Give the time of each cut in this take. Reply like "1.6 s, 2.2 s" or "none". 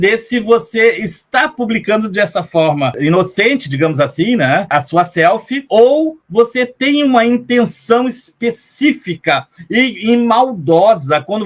none